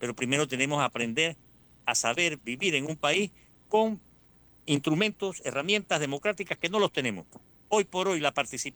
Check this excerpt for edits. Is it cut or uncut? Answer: uncut